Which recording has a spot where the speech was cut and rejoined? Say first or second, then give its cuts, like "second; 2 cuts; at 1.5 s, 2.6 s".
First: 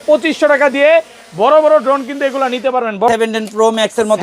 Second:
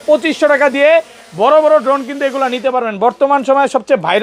first; 1 cut; at 3.1 s